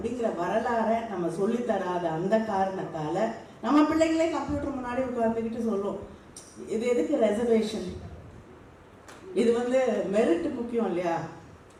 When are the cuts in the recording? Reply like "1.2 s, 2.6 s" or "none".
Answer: none